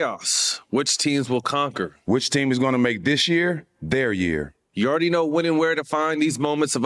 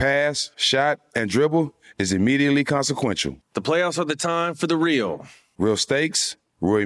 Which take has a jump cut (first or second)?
first